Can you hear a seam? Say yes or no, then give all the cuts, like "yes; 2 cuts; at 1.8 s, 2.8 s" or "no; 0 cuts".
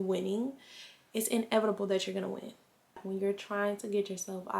yes; 1 cut; at 3.0 s